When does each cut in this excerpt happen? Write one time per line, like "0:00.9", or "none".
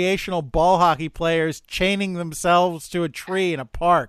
none